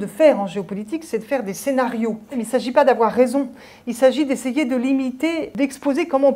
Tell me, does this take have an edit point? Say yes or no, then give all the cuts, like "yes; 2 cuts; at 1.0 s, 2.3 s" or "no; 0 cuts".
yes; 2 cuts; at 2.4 s, 5.5 s